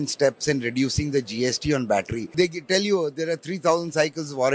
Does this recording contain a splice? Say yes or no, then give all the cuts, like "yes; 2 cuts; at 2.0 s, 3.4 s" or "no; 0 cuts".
yes; 1 cut; at 2.3 s